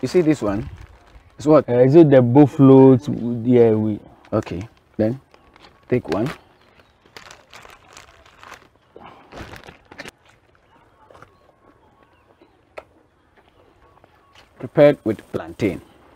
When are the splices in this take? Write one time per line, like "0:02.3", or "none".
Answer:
0:01.7
0:10.1